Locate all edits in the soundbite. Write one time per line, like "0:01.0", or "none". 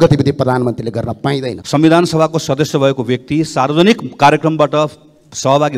0:01.5